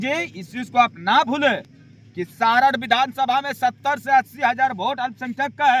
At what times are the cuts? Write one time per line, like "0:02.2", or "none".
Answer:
none